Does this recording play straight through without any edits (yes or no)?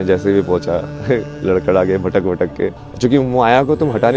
no